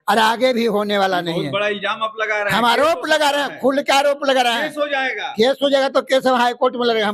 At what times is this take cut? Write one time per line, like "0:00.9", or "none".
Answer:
none